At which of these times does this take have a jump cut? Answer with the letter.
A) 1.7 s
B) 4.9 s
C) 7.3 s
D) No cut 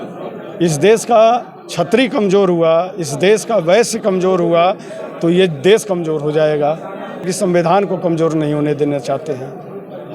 C